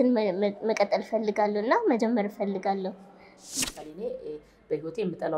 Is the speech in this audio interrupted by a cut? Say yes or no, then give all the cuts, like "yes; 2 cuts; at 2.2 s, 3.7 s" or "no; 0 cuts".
yes; 1 cut; at 3.6 s